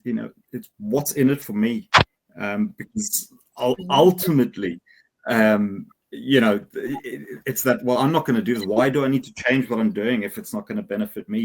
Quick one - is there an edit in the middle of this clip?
no; 0 cuts

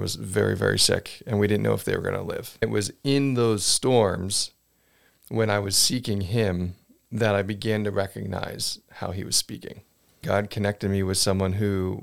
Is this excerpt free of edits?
no; 2 cuts; at 2.6 s, 10.2 s

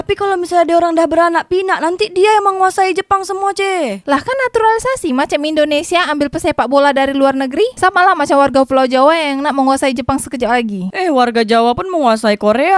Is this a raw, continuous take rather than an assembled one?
yes; 0 cuts

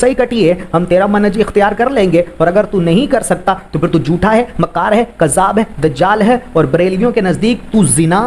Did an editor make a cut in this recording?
no; 0 cuts

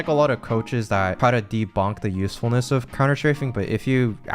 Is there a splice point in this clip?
yes; 1 cut; at 1.2 s

